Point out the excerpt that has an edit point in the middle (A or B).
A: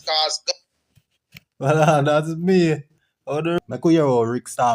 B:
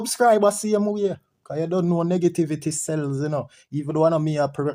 A